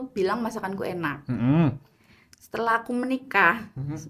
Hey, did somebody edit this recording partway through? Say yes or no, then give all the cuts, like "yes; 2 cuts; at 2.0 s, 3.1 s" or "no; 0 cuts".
no; 0 cuts